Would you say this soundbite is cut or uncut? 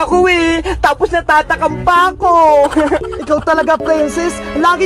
cut